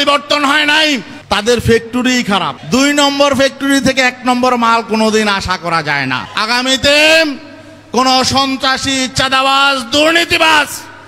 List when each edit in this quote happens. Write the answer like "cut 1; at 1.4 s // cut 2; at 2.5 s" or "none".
cut 1; at 1.1 s // cut 2; at 2.6 s // cut 3; at 6.3 s